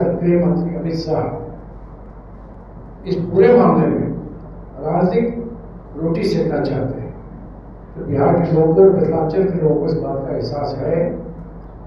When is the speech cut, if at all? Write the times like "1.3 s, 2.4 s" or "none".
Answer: none

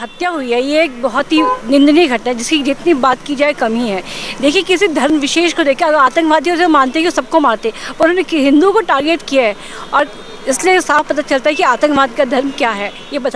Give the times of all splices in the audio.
none

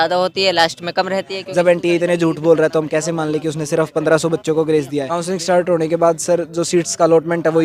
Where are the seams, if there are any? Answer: 1.4 s, 5.1 s

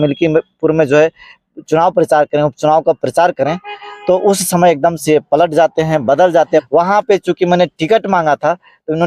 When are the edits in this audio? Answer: 6.7 s

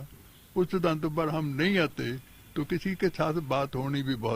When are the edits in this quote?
none

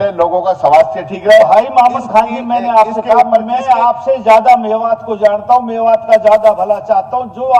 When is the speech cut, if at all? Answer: none

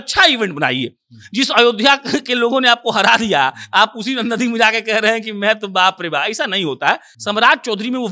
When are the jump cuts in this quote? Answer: 7.1 s

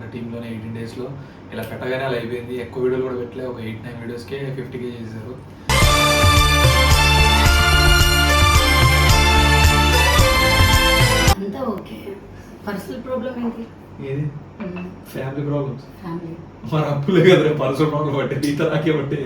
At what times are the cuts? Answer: 11.4 s

